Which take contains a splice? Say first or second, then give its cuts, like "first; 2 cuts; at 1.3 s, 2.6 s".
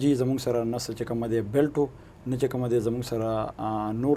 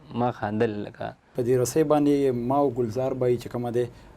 second; 1 cut; at 1.4 s